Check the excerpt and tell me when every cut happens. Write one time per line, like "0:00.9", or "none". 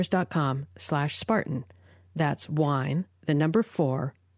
none